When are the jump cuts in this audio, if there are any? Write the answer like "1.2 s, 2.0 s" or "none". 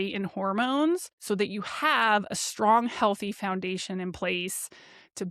1.1 s